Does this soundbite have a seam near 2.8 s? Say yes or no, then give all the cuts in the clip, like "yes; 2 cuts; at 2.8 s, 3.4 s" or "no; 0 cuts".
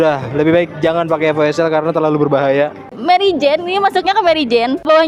yes; 1 cut; at 2.8 s